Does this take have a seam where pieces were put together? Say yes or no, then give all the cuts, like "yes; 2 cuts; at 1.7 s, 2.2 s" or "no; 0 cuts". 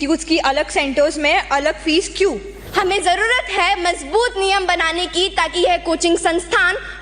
yes; 1 cut; at 2.5 s